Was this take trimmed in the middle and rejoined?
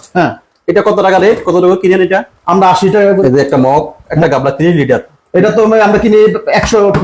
yes; 2 cuts; at 3.2 s, 4.1 s

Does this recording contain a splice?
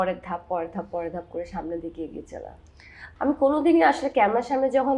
yes; 1 cut; at 3.1 s

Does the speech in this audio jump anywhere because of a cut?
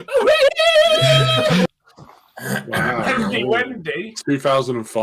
yes; 1 cut; at 1.7 s

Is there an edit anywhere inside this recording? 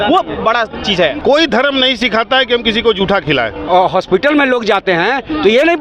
yes; 2 cuts; at 1.2 s, 3.6 s

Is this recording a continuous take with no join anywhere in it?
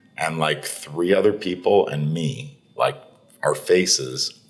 yes; 0 cuts

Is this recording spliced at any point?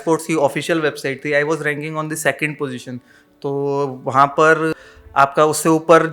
yes; 1 cut; at 4.7 s

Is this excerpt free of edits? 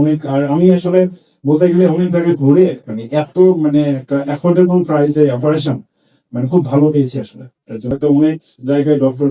no; 1 cut; at 7.8 s

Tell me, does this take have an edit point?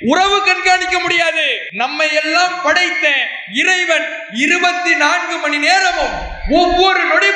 yes; 1 cut; at 1.6 s

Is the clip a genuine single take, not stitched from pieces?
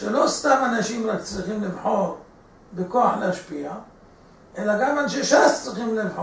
yes; 0 cuts

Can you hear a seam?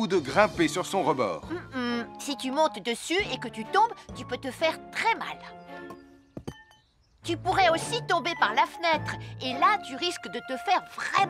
no; 0 cuts

